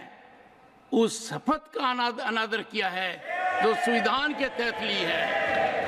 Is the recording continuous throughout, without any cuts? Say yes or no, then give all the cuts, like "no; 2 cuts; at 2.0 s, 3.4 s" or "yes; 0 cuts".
yes; 0 cuts